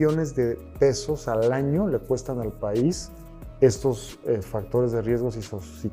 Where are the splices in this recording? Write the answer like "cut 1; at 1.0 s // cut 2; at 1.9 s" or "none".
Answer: none